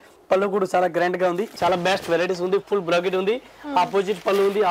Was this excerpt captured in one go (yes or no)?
no